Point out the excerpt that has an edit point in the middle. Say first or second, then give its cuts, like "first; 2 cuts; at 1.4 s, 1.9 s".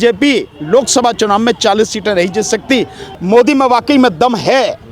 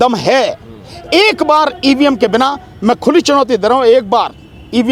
first; 1 cut; at 3.0 s